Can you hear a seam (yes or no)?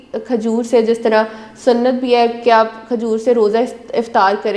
no